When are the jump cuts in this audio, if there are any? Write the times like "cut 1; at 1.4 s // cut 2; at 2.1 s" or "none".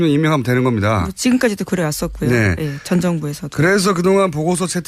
none